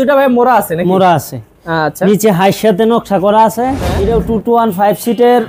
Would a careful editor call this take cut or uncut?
cut